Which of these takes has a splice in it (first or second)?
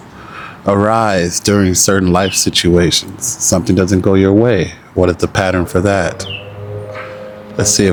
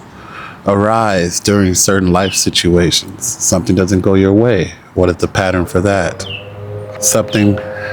second